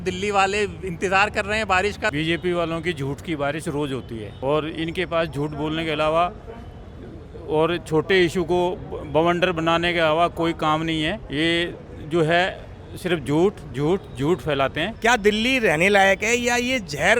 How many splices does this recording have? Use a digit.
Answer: 4